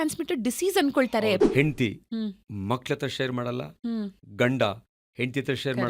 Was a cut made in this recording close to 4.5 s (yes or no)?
no